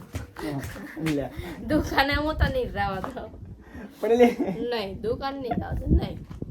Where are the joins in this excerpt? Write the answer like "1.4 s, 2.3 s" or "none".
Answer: none

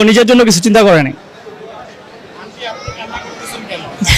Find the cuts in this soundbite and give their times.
none

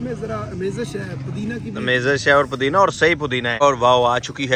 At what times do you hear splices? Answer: 3.6 s

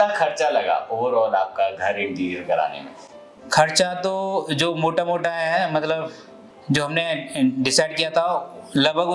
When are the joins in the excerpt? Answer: none

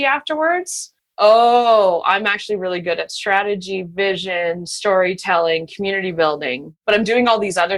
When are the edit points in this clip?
1.1 s, 6.7 s

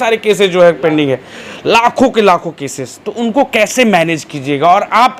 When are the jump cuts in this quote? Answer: none

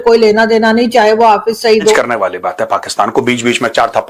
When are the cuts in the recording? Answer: 1.9 s

